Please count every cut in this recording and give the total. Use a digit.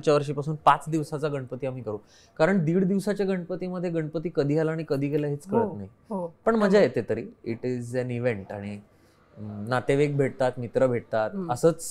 0